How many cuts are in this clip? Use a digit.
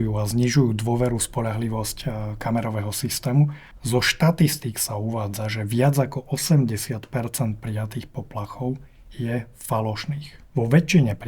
2